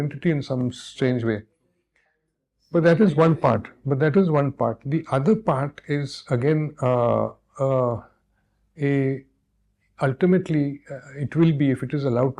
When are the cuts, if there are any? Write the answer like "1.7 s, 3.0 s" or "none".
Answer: none